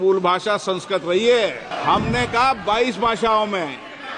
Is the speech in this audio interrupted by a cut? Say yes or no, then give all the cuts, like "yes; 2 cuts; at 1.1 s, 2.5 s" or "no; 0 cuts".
yes; 1 cut; at 1.7 s